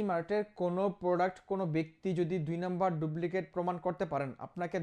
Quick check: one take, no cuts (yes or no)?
yes